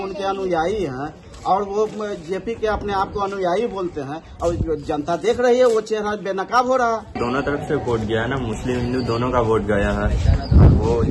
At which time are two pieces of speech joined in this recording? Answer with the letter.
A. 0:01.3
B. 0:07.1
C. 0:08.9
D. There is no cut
B